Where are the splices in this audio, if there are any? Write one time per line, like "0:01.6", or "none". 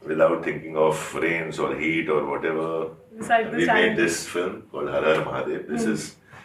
none